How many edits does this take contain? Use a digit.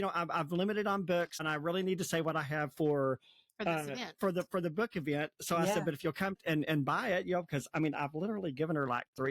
2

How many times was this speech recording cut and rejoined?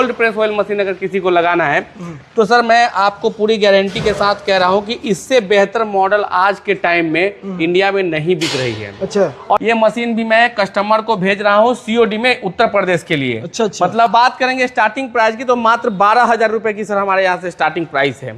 2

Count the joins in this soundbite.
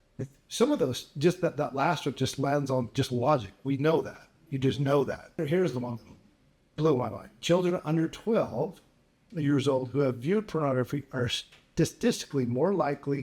1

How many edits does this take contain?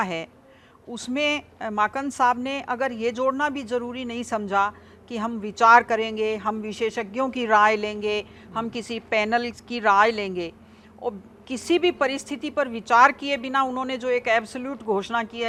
0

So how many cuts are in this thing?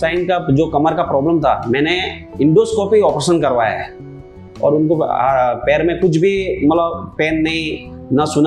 1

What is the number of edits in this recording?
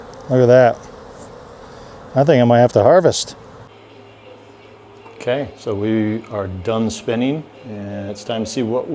1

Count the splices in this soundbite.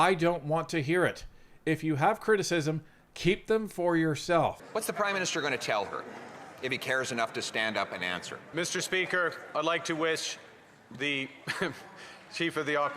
2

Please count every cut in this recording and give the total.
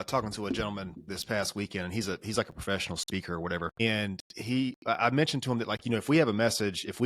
2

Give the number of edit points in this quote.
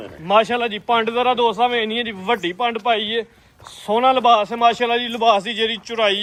0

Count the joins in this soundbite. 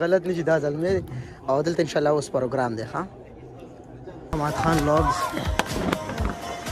1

